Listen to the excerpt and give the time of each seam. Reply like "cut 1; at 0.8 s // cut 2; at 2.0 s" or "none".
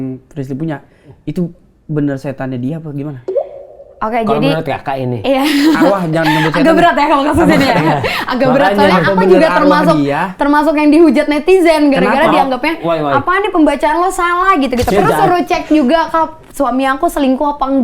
cut 1; at 14.9 s